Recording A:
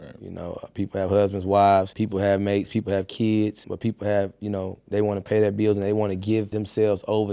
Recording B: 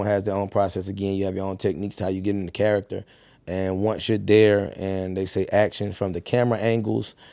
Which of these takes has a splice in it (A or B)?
A